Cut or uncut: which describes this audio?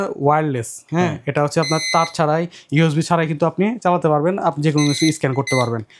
uncut